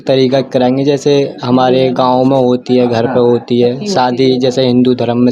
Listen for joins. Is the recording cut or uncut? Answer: uncut